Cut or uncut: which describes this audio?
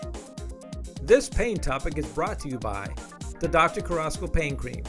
cut